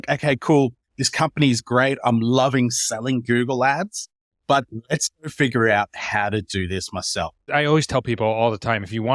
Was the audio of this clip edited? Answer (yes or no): yes